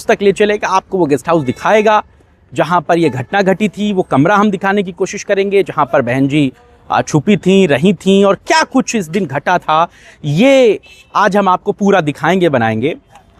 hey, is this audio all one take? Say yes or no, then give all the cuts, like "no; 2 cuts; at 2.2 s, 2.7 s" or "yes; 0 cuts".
yes; 0 cuts